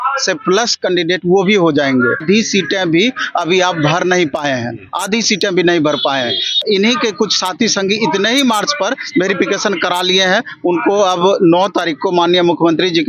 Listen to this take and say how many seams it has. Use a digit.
2